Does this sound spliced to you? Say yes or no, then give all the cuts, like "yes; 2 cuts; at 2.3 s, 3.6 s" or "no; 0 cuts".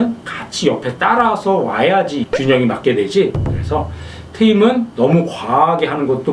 no; 0 cuts